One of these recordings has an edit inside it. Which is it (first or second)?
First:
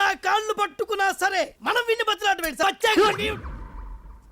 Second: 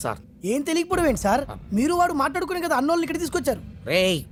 first